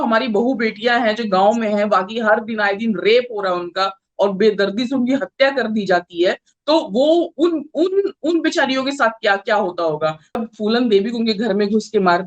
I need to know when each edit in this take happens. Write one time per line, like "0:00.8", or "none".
0:10.4